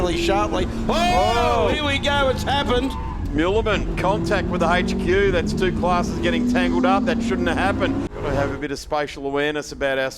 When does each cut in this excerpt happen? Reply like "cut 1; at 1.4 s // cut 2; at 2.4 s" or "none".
cut 1; at 8.1 s